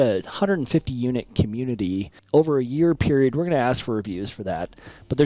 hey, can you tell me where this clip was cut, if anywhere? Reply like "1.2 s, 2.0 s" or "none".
2.1 s